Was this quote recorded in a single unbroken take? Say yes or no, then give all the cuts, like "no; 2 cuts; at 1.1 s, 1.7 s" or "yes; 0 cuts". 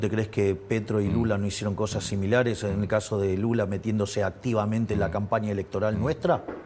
yes; 0 cuts